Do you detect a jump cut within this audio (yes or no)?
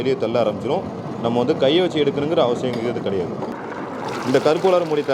yes